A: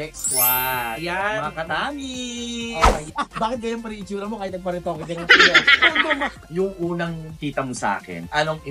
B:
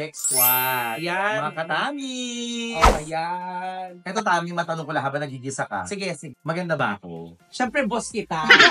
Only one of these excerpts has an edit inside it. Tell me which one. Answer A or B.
A